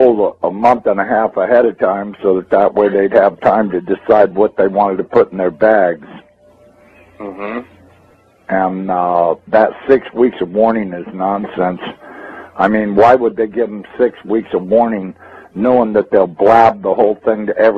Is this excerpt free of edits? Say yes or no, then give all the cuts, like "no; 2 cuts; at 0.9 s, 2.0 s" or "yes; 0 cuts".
no; 1 cut; at 13.8 s